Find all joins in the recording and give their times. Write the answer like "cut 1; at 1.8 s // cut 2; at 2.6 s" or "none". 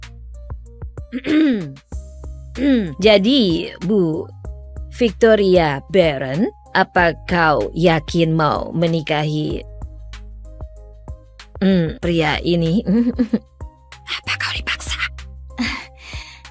cut 1; at 1.1 s // cut 2; at 9.6 s // cut 3; at 11.2 s